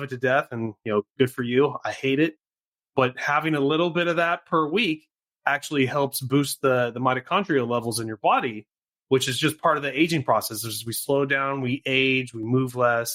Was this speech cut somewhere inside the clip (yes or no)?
no